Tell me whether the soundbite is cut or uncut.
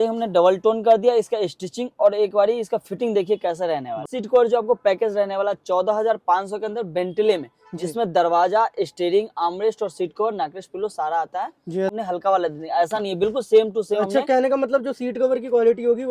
cut